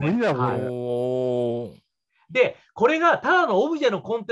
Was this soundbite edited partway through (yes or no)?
no